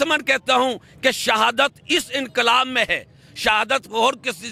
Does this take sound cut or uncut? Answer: uncut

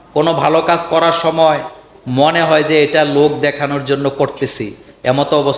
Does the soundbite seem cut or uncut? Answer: uncut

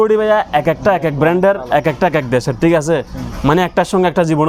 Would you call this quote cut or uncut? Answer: uncut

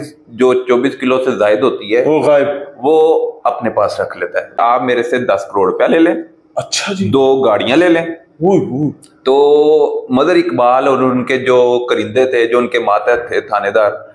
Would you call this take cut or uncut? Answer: cut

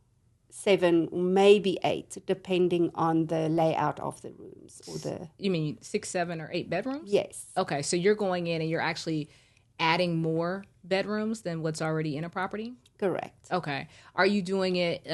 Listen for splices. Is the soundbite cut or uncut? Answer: uncut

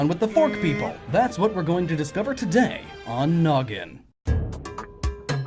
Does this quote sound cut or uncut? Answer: cut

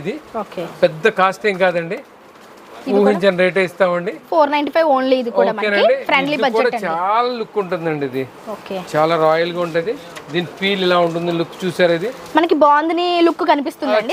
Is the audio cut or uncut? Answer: uncut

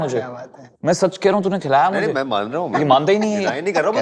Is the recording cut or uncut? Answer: uncut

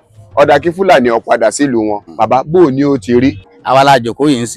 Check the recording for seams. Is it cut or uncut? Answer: cut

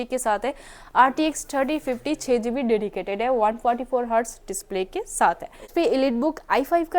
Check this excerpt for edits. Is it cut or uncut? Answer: cut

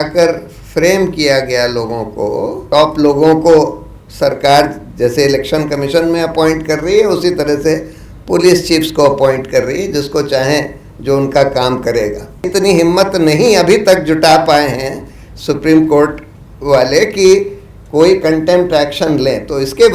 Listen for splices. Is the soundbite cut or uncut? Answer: cut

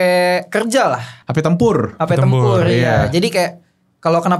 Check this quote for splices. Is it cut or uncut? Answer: cut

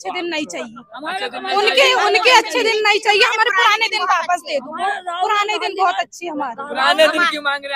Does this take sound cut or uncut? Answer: uncut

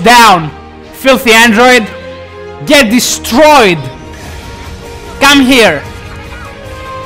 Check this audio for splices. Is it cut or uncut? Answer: cut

